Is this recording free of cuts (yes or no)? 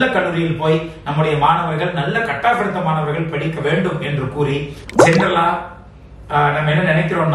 yes